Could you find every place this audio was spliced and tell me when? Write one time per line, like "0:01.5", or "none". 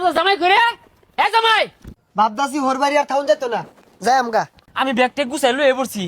0:01.9
0:04.6